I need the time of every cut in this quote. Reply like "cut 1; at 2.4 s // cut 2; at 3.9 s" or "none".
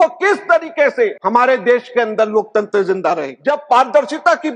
cut 1; at 1.2 s // cut 2; at 3.3 s